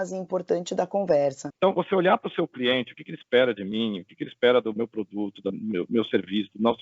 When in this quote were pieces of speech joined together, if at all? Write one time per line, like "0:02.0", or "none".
0:01.5